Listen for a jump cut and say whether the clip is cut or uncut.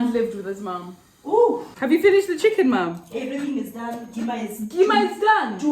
cut